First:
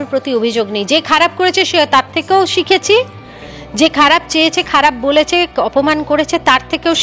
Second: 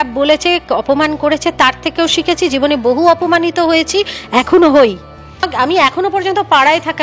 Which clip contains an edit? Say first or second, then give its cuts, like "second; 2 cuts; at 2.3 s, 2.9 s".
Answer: second; 1 cut; at 5.5 s